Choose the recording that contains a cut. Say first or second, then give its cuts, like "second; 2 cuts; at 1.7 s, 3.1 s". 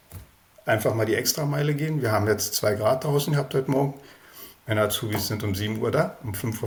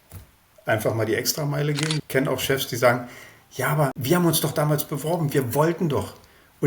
second; 2 cuts; at 2.0 s, 4.0 s